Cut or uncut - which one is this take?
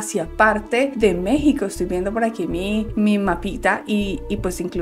uncut